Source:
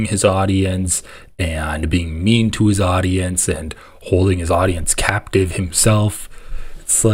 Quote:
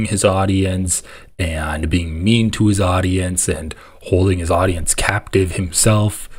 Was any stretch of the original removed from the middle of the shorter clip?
no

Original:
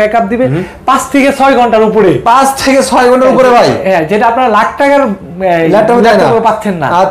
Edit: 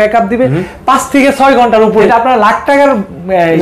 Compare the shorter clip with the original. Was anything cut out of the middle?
yes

